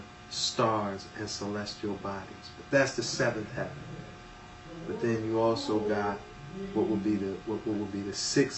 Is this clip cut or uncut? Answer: cut